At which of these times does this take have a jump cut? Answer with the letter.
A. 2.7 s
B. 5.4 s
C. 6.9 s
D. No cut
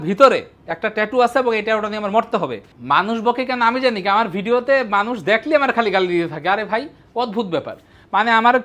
A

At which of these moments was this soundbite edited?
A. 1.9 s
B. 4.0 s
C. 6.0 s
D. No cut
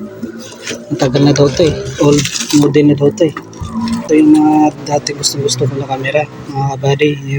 B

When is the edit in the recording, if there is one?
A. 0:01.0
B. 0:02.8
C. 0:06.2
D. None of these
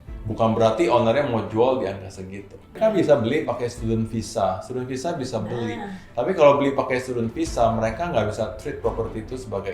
B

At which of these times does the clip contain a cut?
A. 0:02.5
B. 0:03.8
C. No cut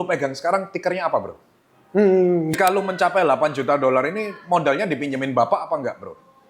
A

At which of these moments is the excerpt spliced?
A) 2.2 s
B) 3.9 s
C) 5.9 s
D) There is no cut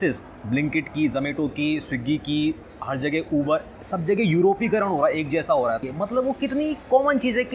C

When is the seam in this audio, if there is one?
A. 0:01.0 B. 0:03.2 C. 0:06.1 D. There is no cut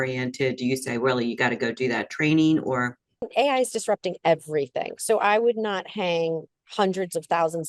B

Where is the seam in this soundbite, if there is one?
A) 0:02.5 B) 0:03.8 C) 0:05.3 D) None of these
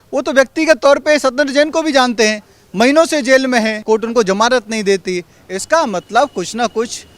B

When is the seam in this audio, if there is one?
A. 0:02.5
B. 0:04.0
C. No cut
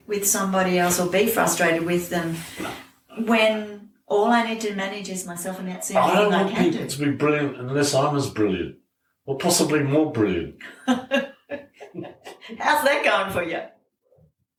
C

